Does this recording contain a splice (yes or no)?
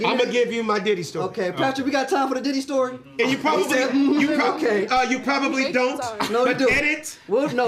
no